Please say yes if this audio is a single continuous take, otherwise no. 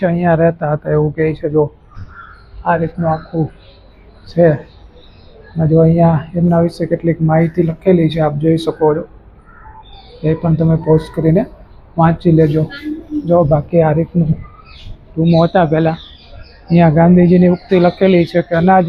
yes